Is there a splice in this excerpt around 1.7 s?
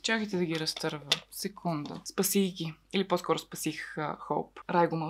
no; 0 cuts

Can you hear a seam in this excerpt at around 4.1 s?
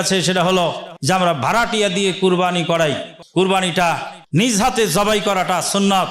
yes; 3 cuts; at 0.9 s, 3.1 s, 4.1 s

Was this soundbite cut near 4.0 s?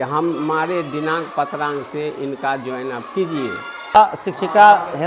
yes; 1 cut; at 4.0 s

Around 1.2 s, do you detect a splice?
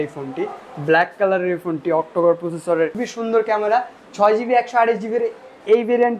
no; 1 cut; at 3.1 s

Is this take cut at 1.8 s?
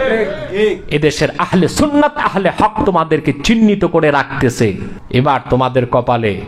no; 1 cut; at 4.9 s

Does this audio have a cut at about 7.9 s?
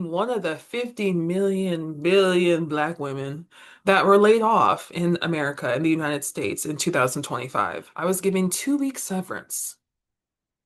no; 0 cuts

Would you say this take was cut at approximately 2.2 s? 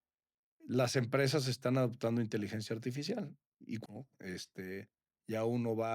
no; 1 cut; at 3.8 s

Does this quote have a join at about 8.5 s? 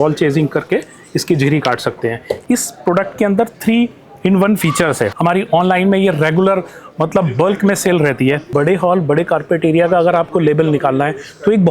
yes; 3 cuts; at 2.4 s, 5.1 s, 8.5 s

